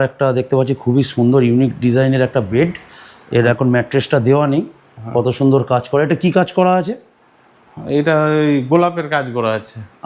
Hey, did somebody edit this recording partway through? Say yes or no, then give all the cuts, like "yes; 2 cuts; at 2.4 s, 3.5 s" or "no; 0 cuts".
no; 0 cuts